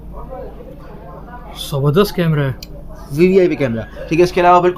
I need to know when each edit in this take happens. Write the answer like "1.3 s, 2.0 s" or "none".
none